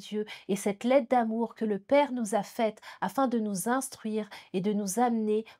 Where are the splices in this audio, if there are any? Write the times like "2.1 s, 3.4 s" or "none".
none